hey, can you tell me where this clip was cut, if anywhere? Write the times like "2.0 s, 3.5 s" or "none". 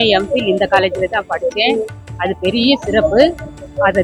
none